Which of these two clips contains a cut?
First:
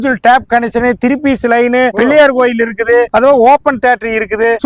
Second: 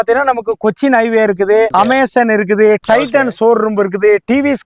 second; 1 cut; at 1.7 s

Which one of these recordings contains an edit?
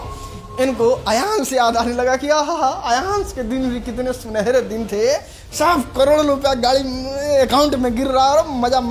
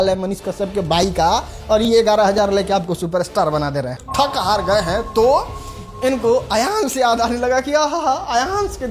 second; 1 cut; at 4.0 s

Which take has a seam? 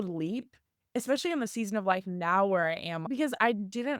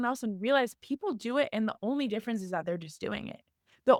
first; 1 cut; at 3.0 s

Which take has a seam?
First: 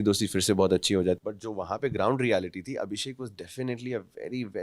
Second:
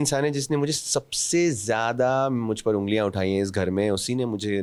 first; 1 cut; at 1.2 s

